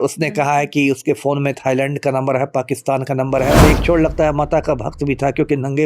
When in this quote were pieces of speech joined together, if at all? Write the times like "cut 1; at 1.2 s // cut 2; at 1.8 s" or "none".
cut 1; at 3.6 s